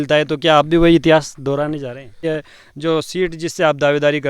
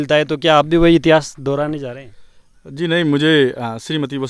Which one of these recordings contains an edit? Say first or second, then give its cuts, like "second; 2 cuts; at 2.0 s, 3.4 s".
first; 1 cut; at 2.2 s